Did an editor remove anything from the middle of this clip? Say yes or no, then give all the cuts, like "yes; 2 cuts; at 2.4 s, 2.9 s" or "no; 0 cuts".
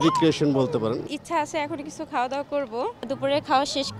yes; 2 cuts; at 1.1 s, 3.1 s